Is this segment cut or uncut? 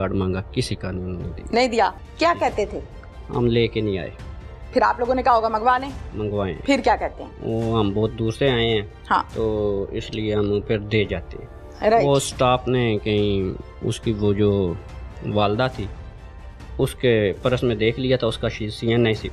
uncut